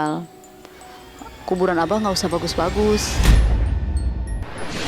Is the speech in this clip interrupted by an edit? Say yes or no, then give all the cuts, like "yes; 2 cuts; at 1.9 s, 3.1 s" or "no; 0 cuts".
yes; 1 cut; at 3.1 s